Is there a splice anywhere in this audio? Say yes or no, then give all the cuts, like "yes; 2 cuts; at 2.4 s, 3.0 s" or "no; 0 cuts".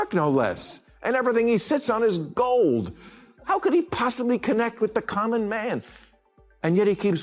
no; 0 cuts